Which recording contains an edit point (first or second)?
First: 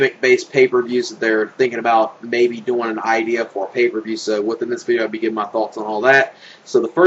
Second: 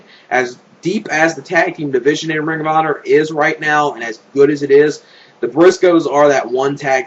first